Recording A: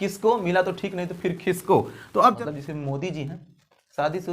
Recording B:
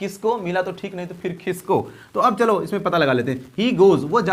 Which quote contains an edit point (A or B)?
A